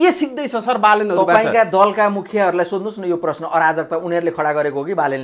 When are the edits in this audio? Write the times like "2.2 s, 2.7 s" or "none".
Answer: none

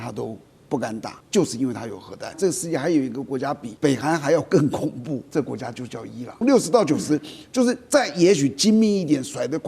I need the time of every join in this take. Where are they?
1.2 s, 2.4 s, 3.7 s, 5.3 s, 6.4 s

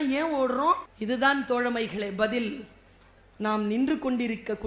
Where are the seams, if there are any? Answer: 0.9 s

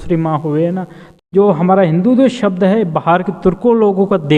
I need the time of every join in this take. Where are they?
1.2 s

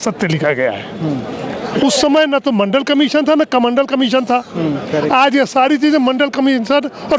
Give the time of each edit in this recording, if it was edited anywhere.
none

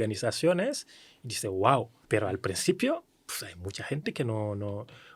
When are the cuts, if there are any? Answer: 2.0 s

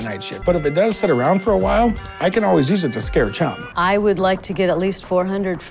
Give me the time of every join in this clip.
none

